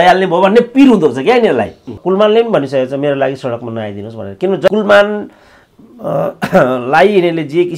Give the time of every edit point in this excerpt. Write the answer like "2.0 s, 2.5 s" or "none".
2.0 s, 4.7 s